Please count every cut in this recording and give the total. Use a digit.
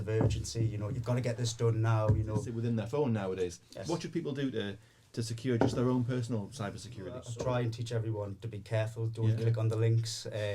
2